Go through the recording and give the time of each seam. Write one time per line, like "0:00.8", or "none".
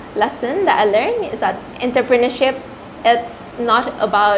none